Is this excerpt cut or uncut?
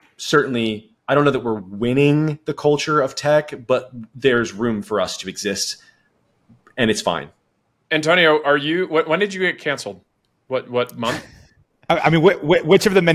uncut